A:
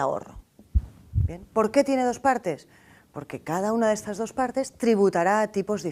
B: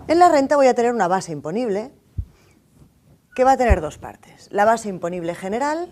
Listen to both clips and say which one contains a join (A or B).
B